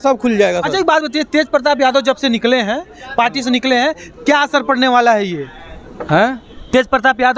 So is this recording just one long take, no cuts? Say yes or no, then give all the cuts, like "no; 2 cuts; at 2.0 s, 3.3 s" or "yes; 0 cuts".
yes; 0 cuts